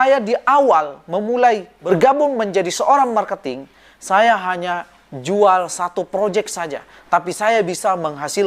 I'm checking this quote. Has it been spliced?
yes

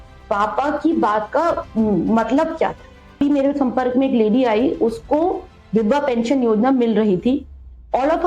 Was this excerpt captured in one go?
no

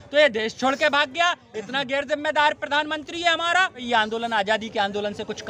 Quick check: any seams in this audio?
yes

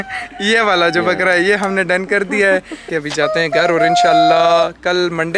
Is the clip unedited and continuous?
no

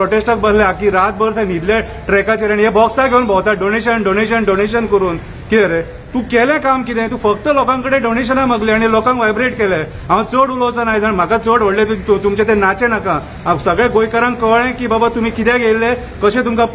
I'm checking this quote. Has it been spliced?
no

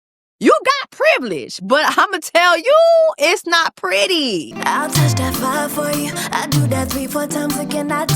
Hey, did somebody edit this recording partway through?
yes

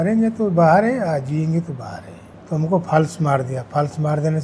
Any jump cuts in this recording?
yes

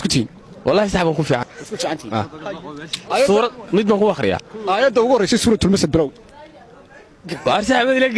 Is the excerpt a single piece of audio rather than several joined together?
no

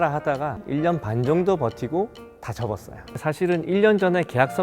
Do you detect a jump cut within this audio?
yes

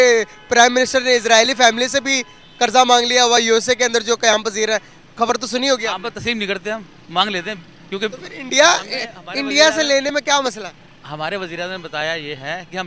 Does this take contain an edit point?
no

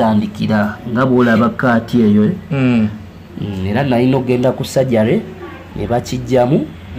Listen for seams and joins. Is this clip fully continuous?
yes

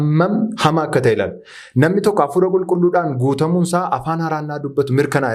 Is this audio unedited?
yes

